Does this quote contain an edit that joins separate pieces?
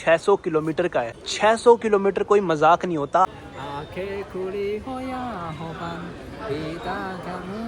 yes; 2 cuts; at 1.2 s, 3.4 s

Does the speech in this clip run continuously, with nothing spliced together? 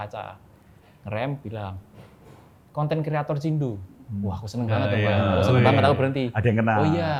yes; 0 cuts

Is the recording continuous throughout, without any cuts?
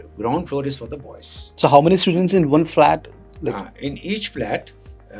yes; 0 cuts

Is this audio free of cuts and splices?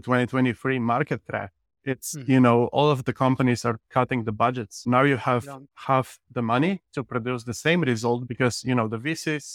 no; 1 cut; at 4.8 s

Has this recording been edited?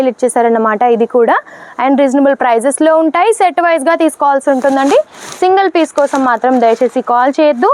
no; 0 cuts

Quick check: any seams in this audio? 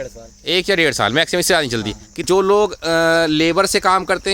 yes; 1 cut; at 2.2 s

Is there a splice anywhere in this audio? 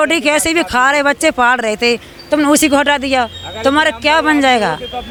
no; 0 cuts

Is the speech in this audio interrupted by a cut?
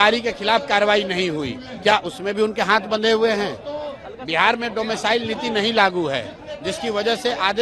no; 0 cuts

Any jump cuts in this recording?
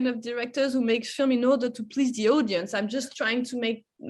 no; 0 cuts

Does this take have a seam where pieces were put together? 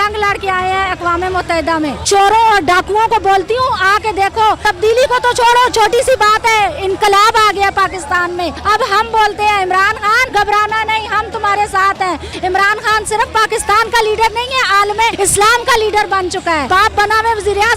yes; 7 cuts; at 2.0 s, 4.6 s, 8.6 s, 10.2 s, 12.3 s, 15.1 s, 16.7 s

